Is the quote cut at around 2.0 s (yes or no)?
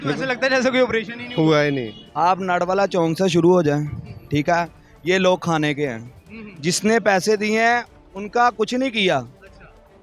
yes